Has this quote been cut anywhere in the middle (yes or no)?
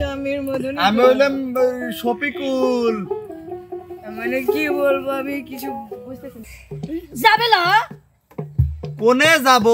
yes